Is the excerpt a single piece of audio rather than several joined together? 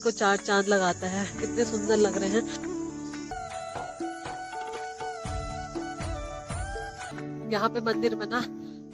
no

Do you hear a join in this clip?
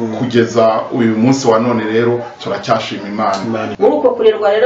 yes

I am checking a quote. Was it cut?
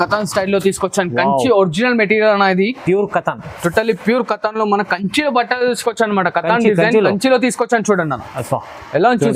no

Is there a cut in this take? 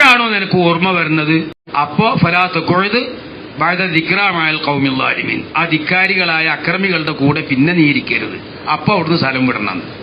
yes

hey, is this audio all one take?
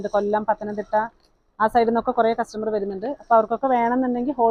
yes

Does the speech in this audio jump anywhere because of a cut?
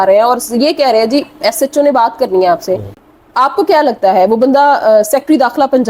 yes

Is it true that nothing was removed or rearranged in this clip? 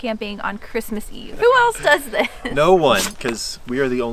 no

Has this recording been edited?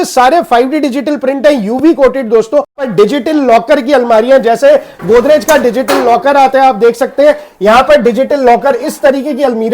yes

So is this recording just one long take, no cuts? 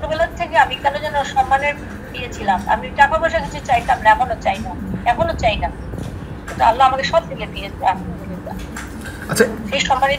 yes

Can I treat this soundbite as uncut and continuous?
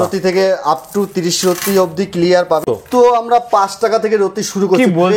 no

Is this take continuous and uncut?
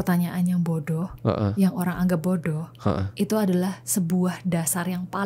yes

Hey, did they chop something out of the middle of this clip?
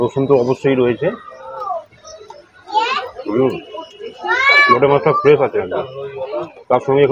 yes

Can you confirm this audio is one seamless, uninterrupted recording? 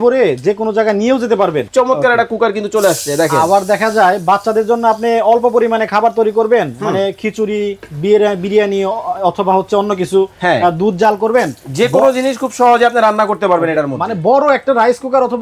no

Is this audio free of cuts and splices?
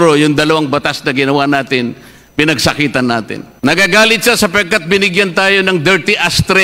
no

